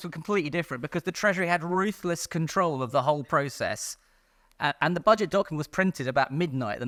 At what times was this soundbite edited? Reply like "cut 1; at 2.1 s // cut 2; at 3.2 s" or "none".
none